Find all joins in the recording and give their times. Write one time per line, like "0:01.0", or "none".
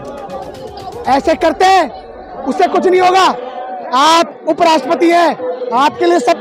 none